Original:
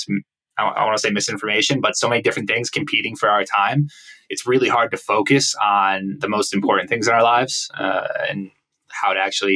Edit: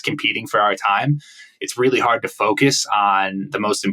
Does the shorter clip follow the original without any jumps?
yes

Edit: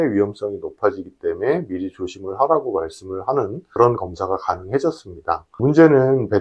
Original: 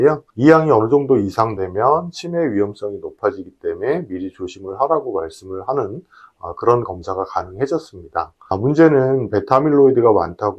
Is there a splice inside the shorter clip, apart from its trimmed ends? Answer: yes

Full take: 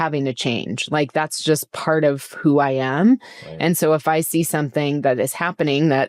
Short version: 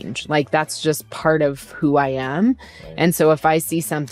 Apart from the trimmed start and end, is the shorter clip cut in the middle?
no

